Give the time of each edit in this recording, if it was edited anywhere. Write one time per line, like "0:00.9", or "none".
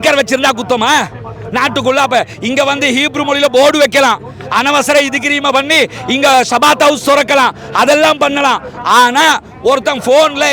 none